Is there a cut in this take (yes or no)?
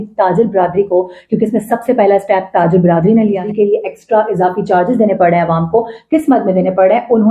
yes